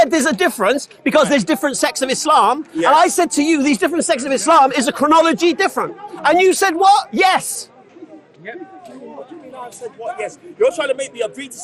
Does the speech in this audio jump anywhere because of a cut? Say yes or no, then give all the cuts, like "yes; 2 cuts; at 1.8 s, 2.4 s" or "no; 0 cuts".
no; 0 cuts